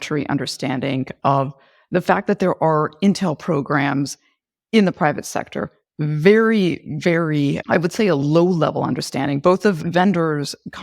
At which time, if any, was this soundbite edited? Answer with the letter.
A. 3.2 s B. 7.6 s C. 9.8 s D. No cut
C